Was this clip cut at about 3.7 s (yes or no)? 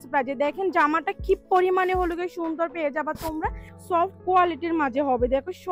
yes